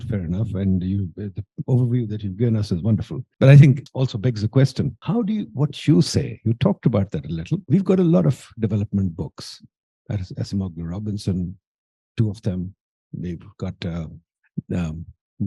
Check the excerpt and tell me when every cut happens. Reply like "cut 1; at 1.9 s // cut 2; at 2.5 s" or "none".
cut 1; at 3.2 s // cut 2; at 3.9 s // cut 3; at 5.0 s // cut 4; at 7.6 s